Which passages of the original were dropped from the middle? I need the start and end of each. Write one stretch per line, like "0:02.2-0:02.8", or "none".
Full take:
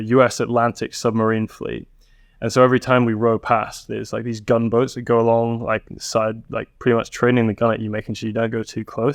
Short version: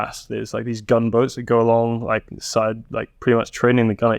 none